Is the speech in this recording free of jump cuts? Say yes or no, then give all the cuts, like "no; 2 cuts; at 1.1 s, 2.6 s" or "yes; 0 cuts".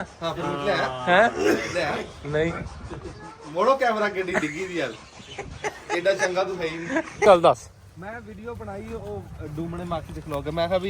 no; 1 cut; at 7.3 s